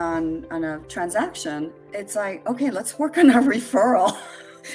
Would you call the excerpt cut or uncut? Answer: cut